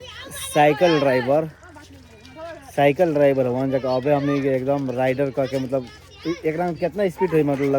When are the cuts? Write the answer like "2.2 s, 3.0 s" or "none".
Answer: none